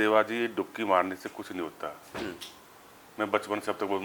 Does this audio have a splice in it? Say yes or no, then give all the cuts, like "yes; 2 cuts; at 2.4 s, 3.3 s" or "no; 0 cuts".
no; 0 cuts